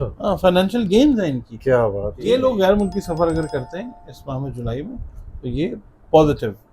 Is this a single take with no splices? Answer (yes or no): no